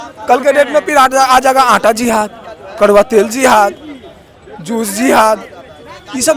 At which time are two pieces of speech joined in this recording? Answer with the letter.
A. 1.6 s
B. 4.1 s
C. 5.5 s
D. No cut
D